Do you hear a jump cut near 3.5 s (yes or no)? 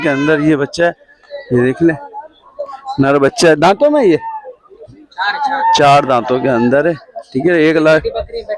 no